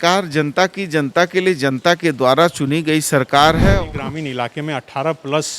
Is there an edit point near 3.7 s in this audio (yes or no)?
yes